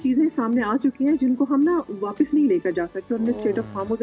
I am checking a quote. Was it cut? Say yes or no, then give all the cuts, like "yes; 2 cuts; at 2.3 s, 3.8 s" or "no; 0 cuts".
no; 0 cuts